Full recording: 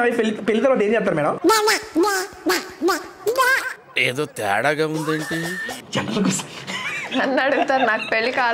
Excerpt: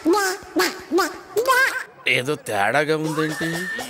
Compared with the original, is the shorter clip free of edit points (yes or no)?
yes